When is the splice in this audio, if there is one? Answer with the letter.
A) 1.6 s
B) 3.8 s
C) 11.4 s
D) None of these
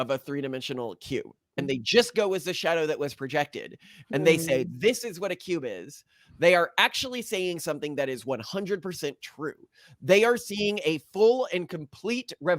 A